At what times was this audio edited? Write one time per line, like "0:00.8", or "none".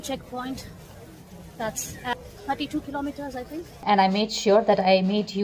0:02.1
0:03.7